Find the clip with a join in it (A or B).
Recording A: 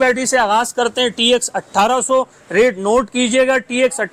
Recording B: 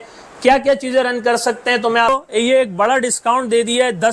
B